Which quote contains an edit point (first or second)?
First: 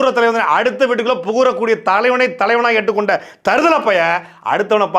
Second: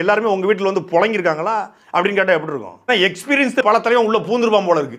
second